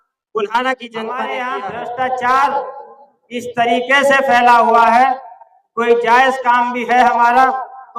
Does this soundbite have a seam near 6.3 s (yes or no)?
no